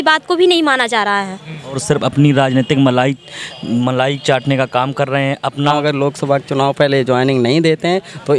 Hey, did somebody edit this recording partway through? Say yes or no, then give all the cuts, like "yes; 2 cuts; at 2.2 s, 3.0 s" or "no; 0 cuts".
yes; 2 cuts; at 1.8 s, 5.7 s